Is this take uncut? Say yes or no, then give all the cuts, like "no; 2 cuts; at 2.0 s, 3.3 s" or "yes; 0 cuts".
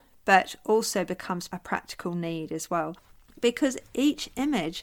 no; 2 cuts; at 1.5 s, 3.1 s